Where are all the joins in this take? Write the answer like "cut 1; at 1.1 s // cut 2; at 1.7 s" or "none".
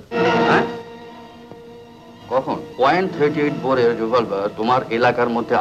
cut 1; at 2.7 s